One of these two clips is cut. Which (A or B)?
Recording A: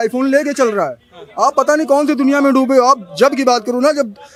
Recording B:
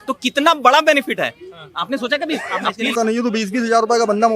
B